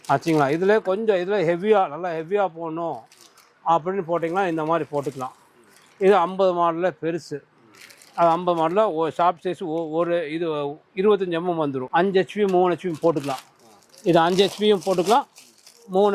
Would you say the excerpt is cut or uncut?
cut